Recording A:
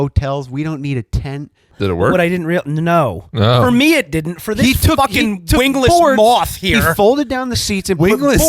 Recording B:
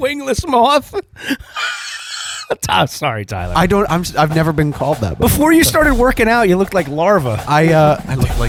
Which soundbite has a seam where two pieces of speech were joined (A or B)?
A